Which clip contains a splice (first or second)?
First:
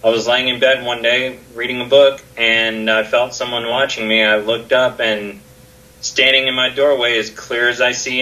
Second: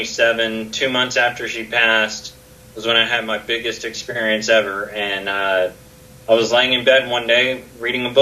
second